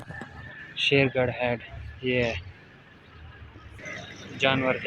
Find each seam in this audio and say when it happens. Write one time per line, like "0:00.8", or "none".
0:03.8